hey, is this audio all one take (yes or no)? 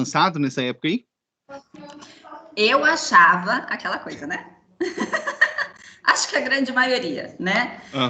yes